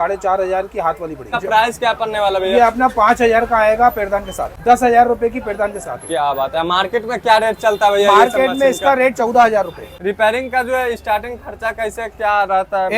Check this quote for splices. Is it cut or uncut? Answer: cut